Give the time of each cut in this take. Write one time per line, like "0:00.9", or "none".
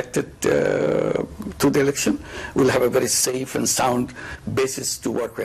none